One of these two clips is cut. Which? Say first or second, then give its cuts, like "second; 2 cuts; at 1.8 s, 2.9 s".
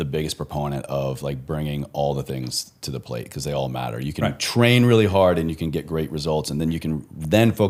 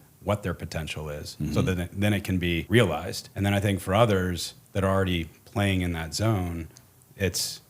second; 2 cuts; at 2.6 s, 3.2 s